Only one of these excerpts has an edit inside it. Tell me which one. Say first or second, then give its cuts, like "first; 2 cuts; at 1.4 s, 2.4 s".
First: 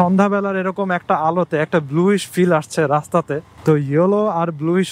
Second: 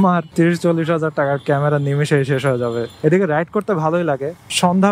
second; 1 cut; at 2.9 s